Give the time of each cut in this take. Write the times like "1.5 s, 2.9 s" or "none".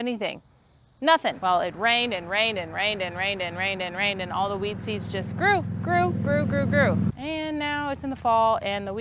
1.4 s, 7.1 s